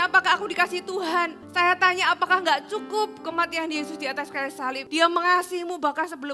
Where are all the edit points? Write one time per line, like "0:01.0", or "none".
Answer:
0:01.4
0:04.8